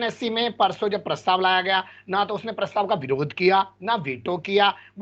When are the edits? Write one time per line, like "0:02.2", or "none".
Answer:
none